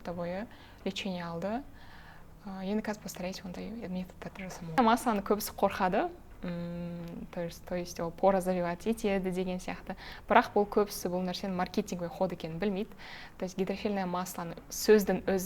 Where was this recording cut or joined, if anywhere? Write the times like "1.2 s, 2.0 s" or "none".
4.8 s